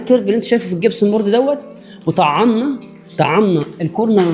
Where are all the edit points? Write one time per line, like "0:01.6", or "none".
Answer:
none